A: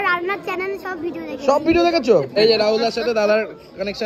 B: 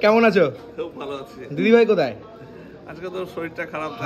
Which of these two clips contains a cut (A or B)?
A